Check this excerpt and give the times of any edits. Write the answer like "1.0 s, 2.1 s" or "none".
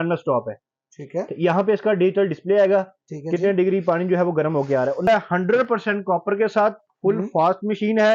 5.1 s